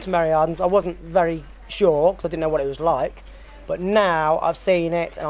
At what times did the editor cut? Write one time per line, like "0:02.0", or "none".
none